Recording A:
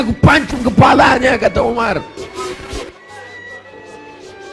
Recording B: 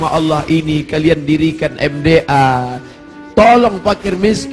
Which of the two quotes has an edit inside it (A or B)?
A